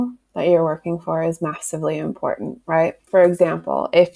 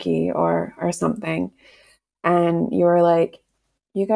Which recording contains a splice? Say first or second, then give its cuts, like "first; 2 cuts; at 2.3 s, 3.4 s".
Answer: first; 1 cut; at 3.0 s